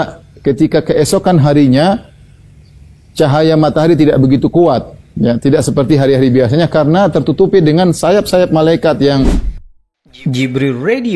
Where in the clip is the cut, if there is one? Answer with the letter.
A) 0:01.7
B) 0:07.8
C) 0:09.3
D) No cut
C